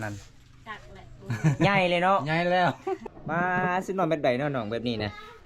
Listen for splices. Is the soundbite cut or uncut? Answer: cut